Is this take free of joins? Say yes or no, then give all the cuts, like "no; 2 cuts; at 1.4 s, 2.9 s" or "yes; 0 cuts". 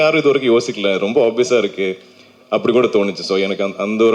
yes; 0 cuts